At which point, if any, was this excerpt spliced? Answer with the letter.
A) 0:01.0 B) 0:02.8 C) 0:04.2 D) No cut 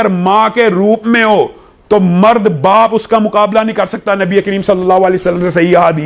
D